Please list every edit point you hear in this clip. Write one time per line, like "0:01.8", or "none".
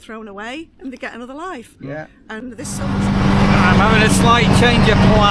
0:03.0

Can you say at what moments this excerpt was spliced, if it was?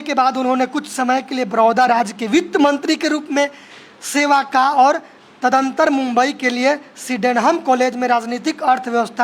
none

